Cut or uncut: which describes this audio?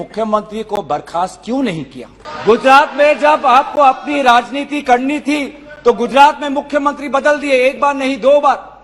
cut